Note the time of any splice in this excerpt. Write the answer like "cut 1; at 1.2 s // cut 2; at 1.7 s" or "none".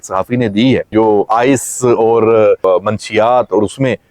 cut 1; at 0.9 s // cut 2; at 2.6 s